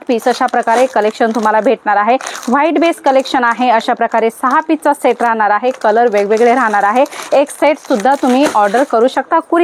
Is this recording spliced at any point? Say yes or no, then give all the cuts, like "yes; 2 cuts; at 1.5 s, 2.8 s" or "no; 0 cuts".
no; 0 cuts